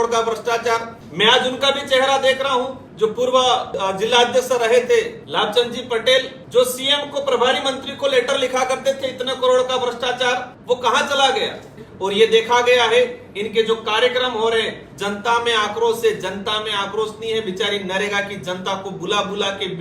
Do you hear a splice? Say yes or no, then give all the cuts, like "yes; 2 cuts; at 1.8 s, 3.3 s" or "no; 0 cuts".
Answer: yes; 7 cuts; at 1.0 s, 2.8 s, 3.7 s, 5.2 s, 6.4 s, 10.5 s, 11.9 s